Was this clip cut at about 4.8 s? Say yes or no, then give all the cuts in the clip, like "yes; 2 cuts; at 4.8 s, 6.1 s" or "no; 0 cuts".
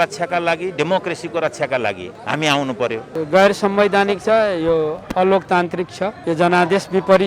no; 3 cuts; at 2.1 s, 3.2 s, 6.2 s